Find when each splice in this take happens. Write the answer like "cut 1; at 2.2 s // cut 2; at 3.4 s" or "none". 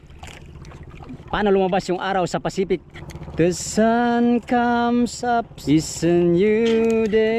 cut 1; at 3.0 s // cut 2; at 5.5 s